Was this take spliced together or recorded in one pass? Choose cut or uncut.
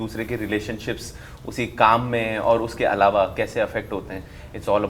uncut